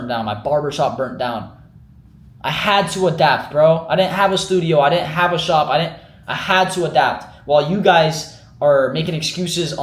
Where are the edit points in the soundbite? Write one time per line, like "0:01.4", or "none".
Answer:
none